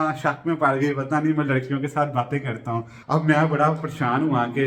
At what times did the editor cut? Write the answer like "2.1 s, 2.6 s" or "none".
2.9 s